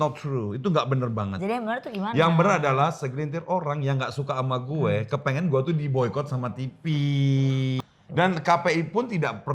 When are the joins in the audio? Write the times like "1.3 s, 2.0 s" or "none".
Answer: 7.8 s